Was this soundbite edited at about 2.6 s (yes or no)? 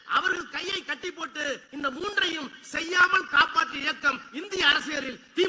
no